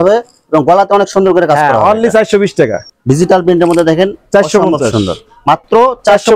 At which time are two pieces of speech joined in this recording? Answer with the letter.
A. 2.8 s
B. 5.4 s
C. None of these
A